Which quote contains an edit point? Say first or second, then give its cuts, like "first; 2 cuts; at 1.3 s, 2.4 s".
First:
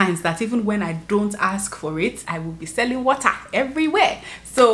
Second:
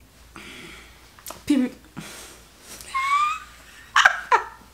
first; 1 cut; at 2.2 s